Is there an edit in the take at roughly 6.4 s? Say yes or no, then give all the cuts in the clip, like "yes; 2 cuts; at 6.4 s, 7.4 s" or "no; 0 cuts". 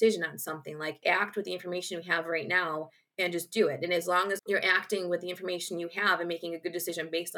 no; 2 cuts; at 1.0 s, 4.5 s